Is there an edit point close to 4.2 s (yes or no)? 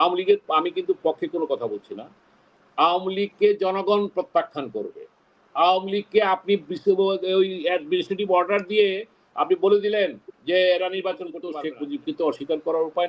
no